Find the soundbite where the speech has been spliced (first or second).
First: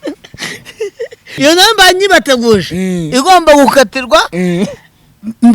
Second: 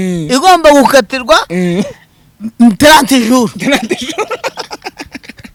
first